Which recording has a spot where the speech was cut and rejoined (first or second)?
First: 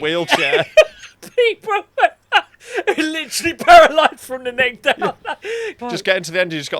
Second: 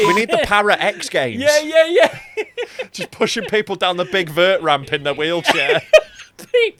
first